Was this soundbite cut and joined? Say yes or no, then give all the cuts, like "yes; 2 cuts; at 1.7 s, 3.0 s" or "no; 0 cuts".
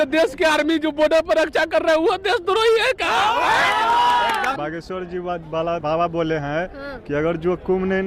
yes; 2 cuts; at 4.6 s, 5.8 s